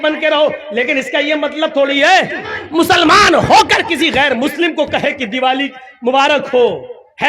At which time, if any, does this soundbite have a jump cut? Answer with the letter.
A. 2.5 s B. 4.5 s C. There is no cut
A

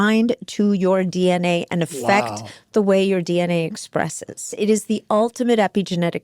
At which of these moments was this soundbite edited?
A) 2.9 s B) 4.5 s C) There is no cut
B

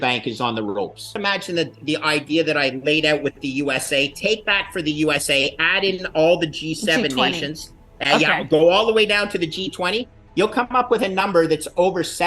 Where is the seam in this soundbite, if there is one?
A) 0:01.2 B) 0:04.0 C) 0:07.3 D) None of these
A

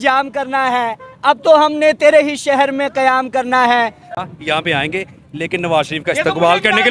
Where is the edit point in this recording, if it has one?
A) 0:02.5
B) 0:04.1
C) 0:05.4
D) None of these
B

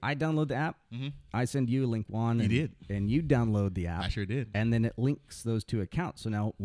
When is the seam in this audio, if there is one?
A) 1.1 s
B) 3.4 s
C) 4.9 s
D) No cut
D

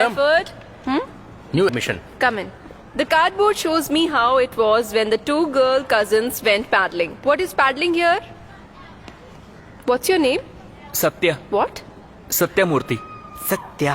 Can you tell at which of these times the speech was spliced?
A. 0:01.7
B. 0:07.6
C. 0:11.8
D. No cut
A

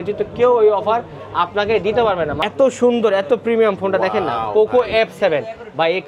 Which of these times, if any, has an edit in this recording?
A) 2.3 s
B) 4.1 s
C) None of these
A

